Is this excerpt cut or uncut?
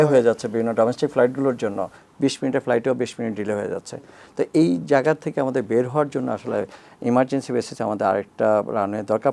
uncut